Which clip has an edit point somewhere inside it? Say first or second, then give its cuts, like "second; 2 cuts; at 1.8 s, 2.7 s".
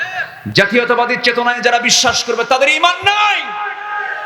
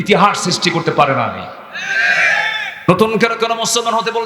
second; 1 cut; at 2.9 s